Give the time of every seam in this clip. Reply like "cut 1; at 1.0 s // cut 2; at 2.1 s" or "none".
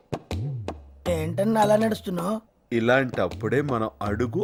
none